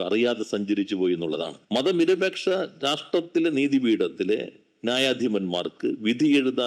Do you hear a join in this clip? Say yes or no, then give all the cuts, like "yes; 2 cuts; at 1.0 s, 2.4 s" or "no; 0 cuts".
yes; 1 cut; at 1.6 s